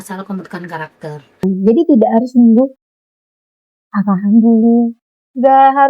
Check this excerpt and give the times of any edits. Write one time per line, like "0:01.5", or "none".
0:01.4